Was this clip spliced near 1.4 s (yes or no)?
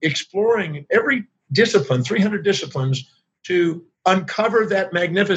yes